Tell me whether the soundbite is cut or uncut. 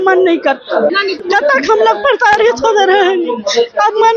cut